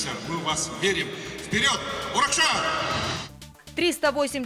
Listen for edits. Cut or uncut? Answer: cut